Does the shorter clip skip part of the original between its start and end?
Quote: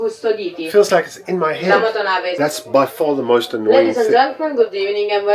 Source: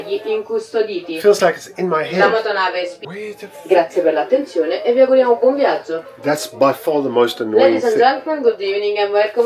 yes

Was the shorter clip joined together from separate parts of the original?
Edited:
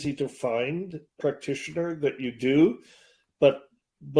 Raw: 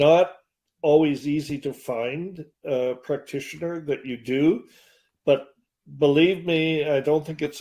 yes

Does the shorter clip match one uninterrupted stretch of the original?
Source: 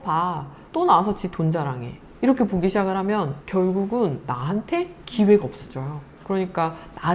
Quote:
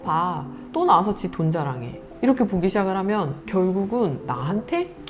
yes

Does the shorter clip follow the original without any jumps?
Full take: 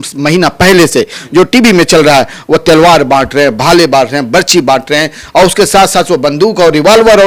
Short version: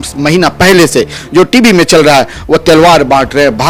yes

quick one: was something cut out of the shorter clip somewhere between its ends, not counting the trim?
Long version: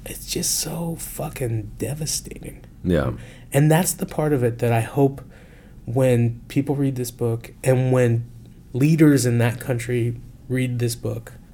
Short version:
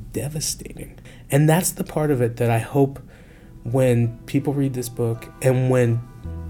yes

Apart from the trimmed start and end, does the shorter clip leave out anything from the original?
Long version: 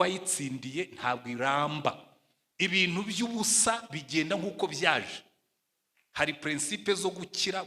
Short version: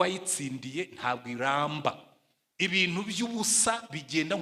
no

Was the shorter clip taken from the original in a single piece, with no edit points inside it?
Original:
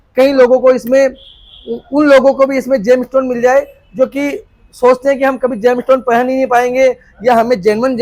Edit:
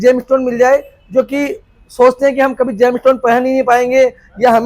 yes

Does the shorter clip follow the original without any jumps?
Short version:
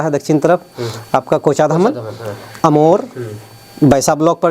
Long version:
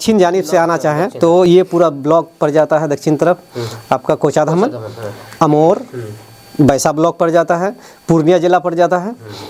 yes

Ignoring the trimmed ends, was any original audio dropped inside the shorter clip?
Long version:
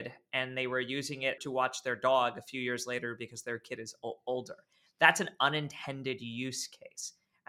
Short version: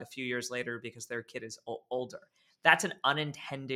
no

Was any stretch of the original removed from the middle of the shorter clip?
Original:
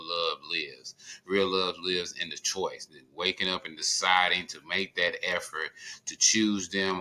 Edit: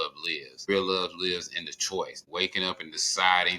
yes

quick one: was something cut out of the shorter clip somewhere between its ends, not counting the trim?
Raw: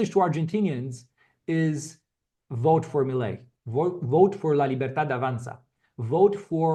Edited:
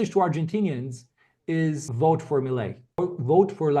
yes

